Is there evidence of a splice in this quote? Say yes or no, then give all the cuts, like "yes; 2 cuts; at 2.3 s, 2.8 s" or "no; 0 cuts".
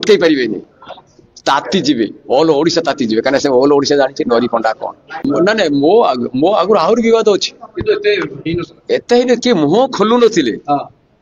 yes; 1 cut; at 5.2 s